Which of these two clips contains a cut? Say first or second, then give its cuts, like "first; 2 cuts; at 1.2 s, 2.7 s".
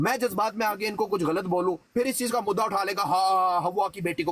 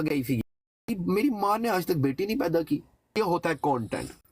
second; 2 cuts; at 0.9 s, 3.2 s